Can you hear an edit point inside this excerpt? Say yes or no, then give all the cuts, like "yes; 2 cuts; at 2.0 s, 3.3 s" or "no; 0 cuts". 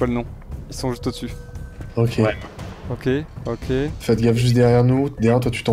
no; 0 cuts